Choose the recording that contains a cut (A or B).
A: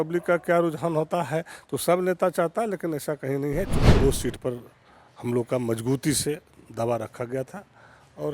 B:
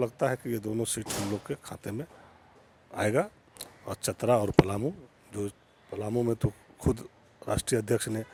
A